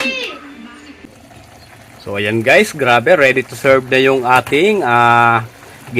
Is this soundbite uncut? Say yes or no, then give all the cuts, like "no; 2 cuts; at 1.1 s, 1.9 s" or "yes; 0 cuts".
no; 1 cut; at 1.0 s